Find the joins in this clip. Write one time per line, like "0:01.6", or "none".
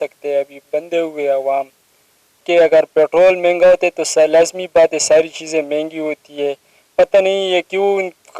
0:02.4